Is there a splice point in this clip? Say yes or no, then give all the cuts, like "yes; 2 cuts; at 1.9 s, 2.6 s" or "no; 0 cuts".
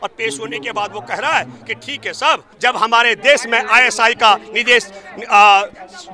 yes; 1 cut; at 2.5 s